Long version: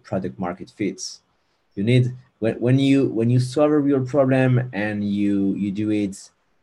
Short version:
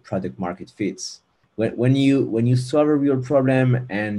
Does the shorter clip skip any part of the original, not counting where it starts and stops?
yes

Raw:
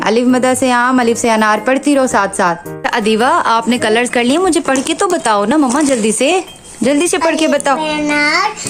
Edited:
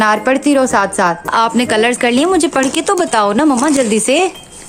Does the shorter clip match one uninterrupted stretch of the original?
no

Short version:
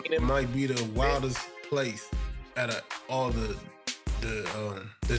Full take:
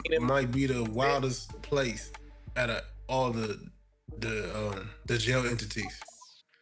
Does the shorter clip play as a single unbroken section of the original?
yes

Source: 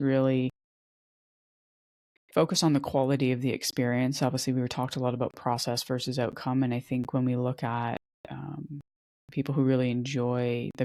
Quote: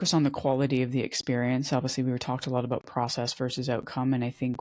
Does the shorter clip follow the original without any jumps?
yes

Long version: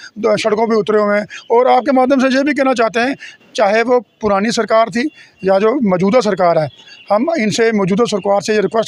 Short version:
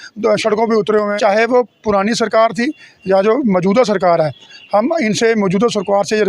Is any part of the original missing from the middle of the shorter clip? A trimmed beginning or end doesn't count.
yes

